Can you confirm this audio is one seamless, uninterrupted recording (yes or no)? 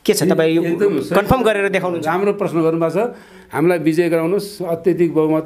no